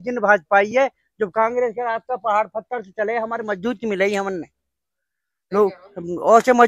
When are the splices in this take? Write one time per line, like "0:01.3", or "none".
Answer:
none